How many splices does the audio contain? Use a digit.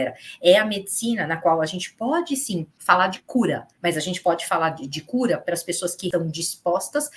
3